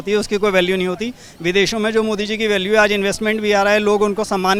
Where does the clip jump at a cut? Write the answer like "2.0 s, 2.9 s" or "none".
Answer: none

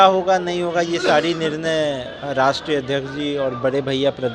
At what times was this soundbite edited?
none

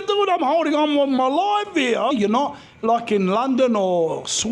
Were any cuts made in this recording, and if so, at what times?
2.1 s

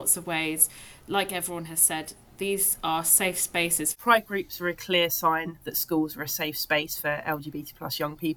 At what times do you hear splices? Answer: 3.9 s

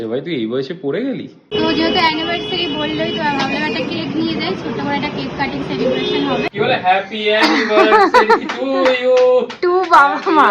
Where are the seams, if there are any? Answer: 1.5 s, 6.5 s

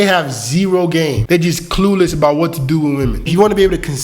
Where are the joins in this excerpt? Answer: 1.2 s, 3.3 s

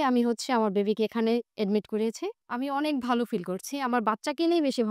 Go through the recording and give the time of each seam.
2.4 s

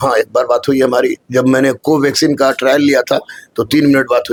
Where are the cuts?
none

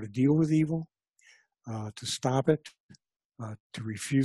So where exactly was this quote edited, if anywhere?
none

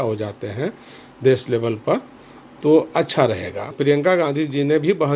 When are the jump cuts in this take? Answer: 3.7 s

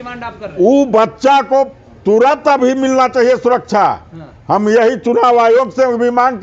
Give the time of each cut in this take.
none

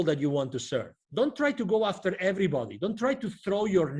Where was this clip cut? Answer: 1.0 s

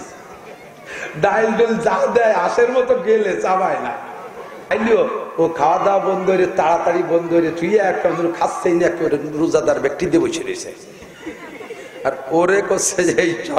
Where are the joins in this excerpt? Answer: 4.7 s

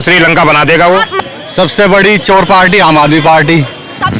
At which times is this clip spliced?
1.2 s

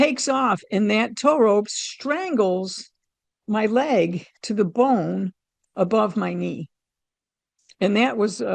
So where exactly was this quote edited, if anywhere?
none

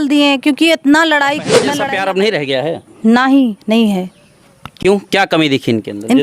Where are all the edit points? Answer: 1.6 s

